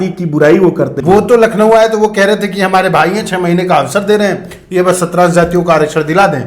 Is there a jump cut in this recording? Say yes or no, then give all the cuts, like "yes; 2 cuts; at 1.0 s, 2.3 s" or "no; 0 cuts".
yes; 1 cut; at 1.0 s